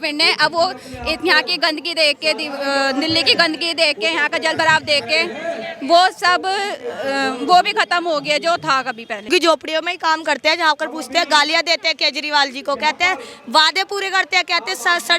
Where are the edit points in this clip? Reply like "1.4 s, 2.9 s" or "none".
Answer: 9.3 s

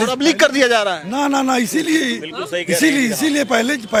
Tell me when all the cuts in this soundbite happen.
none

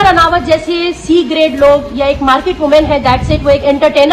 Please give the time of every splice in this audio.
none

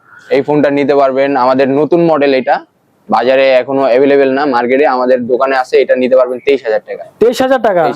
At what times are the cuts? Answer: none

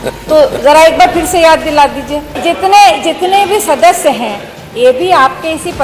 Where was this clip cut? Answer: 2.3 s

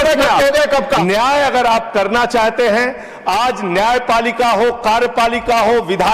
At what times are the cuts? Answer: 1.0 s

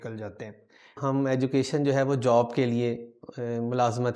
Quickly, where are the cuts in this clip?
0.9 s

